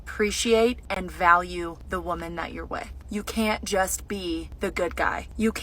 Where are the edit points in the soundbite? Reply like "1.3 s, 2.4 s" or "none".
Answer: 0.9 s, 1.8 s, 3.0 s, 4.9 s